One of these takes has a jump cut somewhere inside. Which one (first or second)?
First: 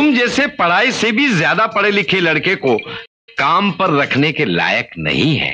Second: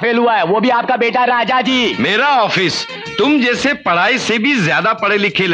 second